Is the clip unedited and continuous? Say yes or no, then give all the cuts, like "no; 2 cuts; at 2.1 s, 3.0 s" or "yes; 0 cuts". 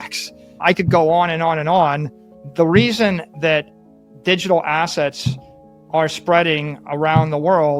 yes; 0 cuts